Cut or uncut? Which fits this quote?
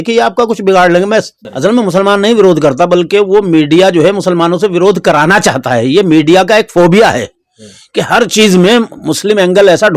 cut